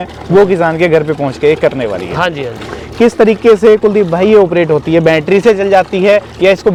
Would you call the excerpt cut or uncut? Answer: uncut